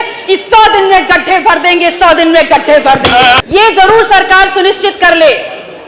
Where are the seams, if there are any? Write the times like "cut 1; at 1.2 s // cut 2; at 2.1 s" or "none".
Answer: cut 1; at 3.4 s